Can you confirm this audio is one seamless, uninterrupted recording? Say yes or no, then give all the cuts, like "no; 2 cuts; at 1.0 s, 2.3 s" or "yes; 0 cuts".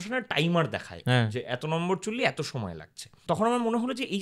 no; 1 cut; at 3.1 s